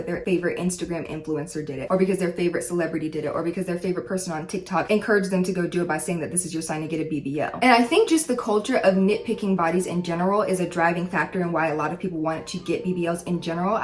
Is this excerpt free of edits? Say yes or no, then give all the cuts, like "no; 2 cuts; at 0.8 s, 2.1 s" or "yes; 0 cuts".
yes; 0 cuts